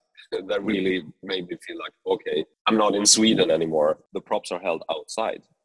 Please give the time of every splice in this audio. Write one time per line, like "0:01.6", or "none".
0:02.5
0:04.1